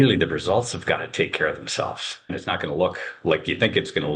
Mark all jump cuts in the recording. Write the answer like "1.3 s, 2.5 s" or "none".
2.3 s